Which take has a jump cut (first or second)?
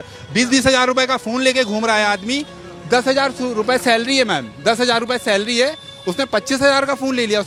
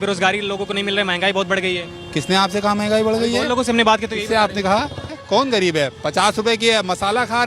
second